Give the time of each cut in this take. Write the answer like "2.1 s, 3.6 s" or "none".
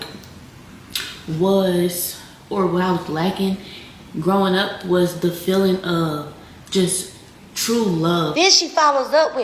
8.3 s